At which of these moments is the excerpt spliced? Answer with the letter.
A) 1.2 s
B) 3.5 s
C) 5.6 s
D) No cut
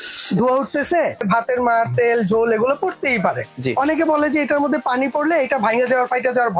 A